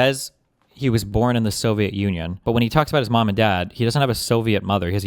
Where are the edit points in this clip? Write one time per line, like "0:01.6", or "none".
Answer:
0:01.1
0:02.3